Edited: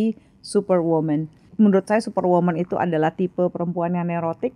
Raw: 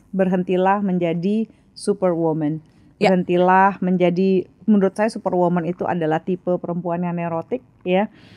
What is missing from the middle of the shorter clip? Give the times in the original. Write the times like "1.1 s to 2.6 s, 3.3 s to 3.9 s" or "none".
2.8 s to 4.5 s